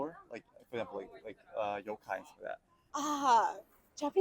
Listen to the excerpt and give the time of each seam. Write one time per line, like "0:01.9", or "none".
0:02.8